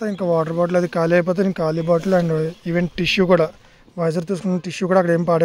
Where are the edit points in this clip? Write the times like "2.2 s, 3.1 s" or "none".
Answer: none

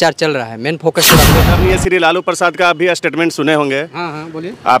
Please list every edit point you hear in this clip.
1.4 s

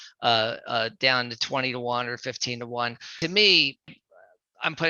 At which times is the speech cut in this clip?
3.1 s, 3.9 s

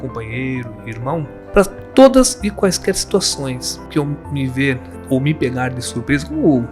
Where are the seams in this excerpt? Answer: 1.4 s, 3.7 s, 4.9 s

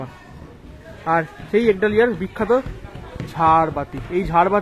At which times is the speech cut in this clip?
none

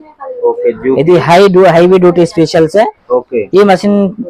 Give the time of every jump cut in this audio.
none

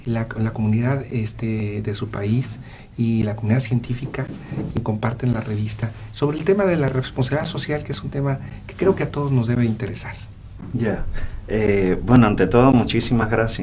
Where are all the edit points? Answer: none

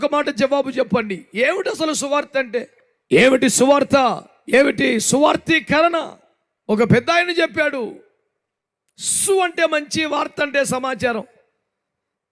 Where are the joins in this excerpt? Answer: none

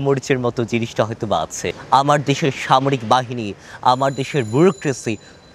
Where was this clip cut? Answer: 1.7 s

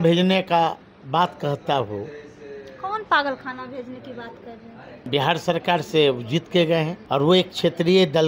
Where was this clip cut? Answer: 5.0 s, 7.0 s

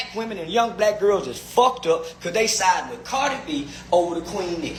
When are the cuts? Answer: none

